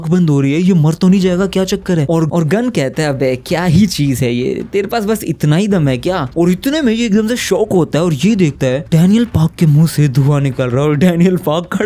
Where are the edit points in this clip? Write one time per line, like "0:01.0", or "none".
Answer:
none